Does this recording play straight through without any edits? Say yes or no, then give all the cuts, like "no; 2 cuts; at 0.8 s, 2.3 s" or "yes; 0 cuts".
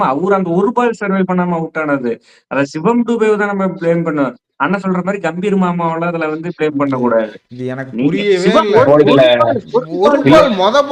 yes; 0 cuts